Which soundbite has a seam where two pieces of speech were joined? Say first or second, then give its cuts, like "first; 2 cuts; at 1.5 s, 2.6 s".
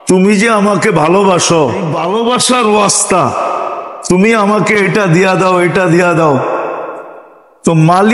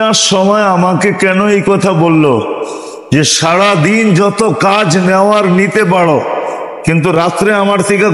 first; 1 cut; at 2.0 s